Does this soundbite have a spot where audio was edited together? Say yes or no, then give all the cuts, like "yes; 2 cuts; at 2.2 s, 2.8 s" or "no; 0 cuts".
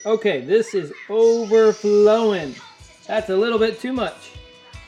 no; 0 cuts